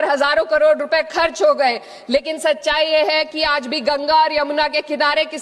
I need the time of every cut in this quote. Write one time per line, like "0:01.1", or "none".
none